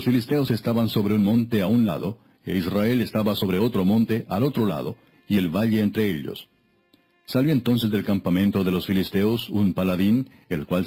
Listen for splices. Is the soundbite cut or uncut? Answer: uncut